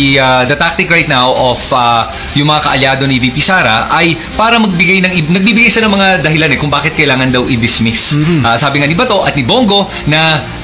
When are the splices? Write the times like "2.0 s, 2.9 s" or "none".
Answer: none